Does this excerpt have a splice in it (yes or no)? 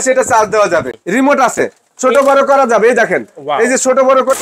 yes